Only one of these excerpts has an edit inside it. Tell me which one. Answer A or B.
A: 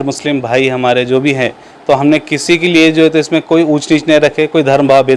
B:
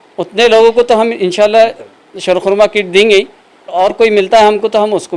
B